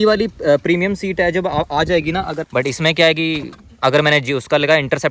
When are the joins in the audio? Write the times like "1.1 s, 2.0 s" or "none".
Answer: 2.4 s